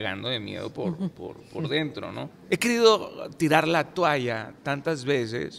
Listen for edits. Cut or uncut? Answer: cut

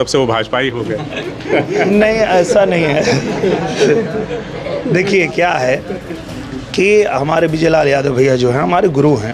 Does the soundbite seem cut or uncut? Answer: uncut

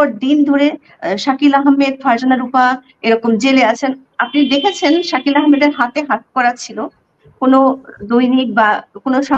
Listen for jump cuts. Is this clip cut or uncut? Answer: uncut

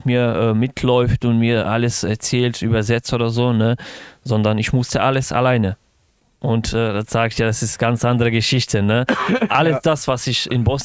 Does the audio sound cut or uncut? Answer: uncut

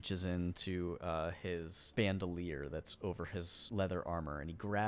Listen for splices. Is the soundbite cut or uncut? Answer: cut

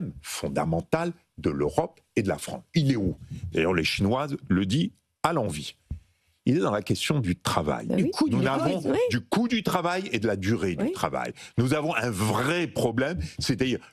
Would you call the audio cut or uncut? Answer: uncut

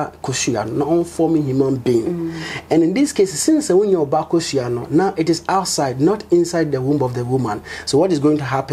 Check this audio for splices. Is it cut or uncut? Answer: uncut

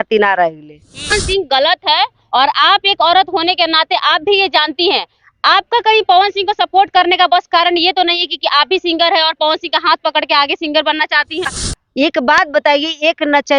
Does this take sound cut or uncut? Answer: cut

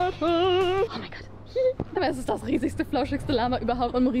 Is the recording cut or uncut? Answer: uncut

